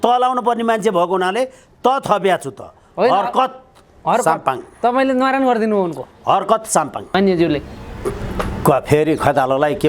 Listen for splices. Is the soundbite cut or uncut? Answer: cut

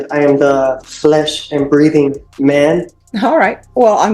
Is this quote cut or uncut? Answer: cut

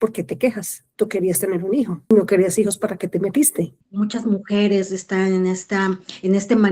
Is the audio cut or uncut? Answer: cut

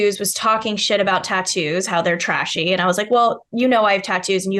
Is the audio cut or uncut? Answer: uncut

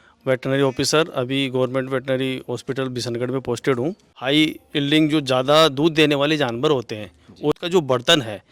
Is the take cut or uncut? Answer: cut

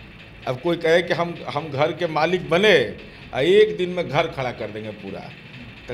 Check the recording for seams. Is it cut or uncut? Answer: uncut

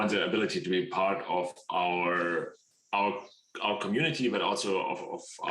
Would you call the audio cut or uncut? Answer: uncut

